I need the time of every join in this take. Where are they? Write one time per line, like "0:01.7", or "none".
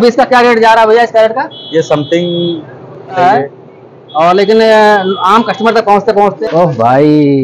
0:03.2
0:06.4